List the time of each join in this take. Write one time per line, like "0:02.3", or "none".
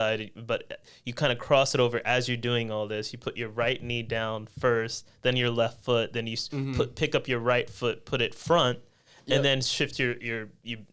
none